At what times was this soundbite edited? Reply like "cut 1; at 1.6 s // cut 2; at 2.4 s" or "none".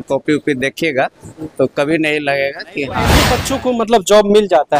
cut 1; at 3.2 s